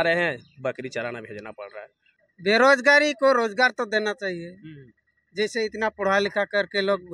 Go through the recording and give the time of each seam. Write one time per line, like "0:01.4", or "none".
0:02.0